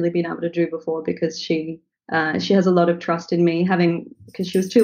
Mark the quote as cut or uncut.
uncut